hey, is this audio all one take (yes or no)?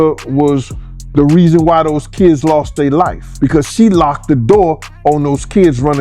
no